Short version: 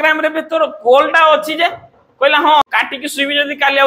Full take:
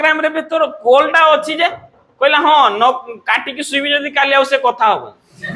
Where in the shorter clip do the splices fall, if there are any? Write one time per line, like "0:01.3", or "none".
0:02.6